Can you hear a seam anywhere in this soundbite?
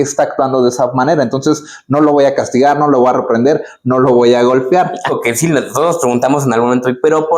yes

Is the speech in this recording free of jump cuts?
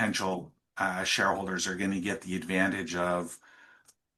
yes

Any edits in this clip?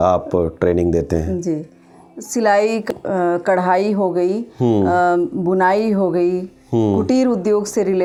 no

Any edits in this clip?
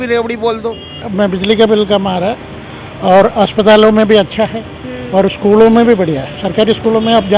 yes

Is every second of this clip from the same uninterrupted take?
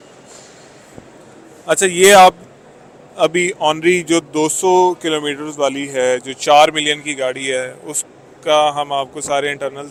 yes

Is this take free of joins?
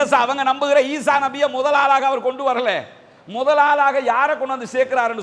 yes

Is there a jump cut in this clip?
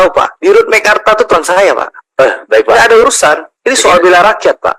no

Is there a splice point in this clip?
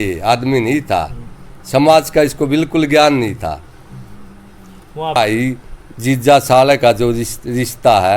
yes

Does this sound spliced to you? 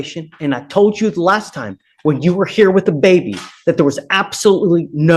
no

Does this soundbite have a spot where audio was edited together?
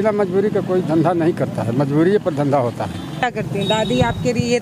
yes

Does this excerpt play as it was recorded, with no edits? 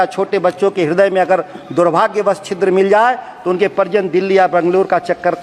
yes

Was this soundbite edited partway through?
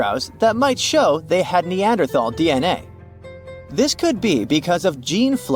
no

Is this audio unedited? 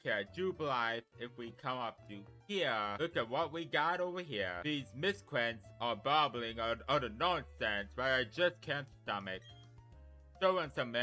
no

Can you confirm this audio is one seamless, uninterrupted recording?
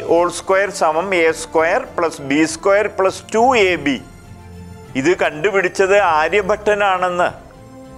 yes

